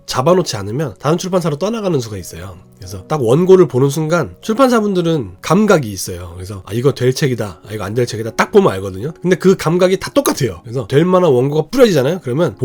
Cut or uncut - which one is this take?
uncut